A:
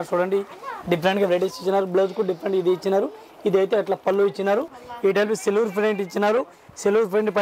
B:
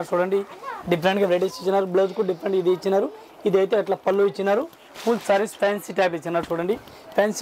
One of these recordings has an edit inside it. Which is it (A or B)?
A